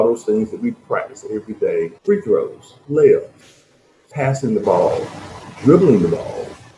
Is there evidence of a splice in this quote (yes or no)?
yes